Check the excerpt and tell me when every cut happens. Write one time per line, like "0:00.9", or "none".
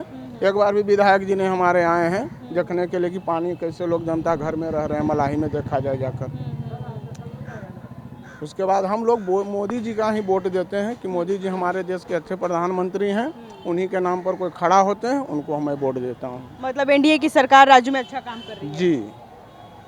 none